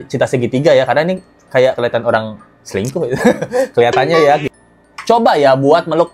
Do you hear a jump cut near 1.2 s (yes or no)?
no